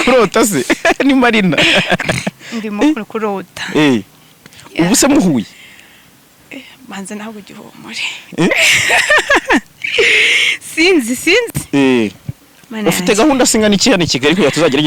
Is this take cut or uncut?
uncut